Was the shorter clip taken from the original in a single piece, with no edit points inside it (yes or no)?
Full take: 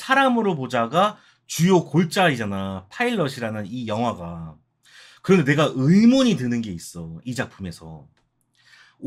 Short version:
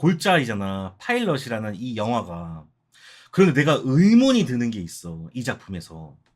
yes